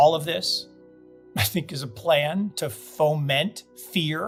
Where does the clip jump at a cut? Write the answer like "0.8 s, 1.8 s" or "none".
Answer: none